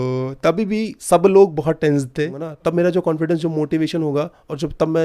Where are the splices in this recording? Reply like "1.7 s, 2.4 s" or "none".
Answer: 2.4 s